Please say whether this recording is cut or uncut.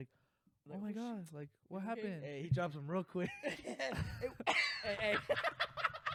uncut